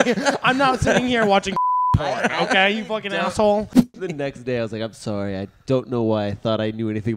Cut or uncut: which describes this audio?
cut